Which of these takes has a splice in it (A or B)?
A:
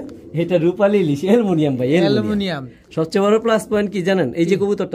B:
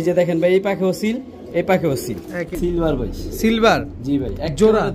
B